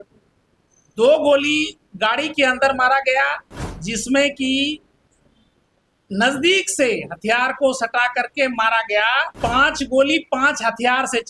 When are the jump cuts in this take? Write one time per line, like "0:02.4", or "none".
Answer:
0:09.3